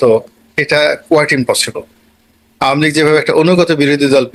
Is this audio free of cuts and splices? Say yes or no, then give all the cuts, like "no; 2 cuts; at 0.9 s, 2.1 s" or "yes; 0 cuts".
yes; 0 cuts